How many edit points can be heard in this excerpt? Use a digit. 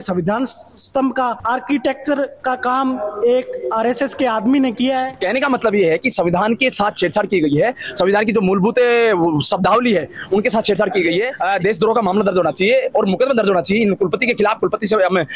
2